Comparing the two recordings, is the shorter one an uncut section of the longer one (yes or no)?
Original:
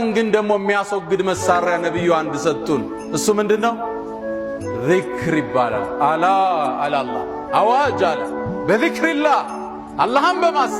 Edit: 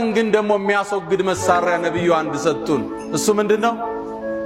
yes